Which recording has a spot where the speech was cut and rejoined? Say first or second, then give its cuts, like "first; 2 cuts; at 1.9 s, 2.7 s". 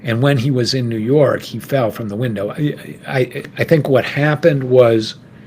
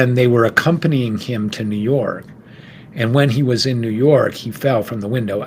first; 1 cut; at 3.5 s